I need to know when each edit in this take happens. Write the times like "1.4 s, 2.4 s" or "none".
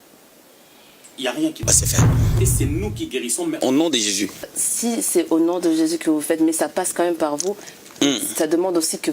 2.3 s, 4.6 s